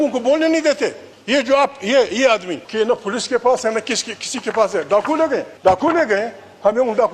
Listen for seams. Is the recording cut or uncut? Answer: cut